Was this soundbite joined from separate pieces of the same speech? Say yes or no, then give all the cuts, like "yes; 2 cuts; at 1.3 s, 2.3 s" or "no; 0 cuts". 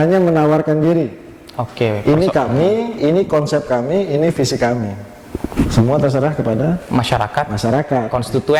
no; 0 cuts